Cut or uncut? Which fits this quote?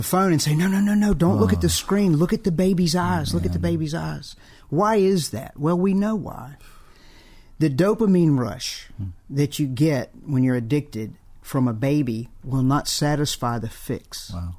uncut